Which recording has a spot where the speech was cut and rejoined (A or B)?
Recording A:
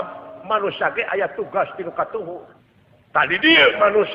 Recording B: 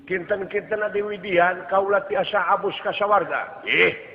A